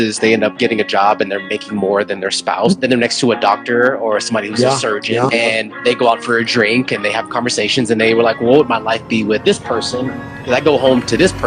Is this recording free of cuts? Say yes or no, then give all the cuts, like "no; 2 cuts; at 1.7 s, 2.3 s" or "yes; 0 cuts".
yes; 0 cuts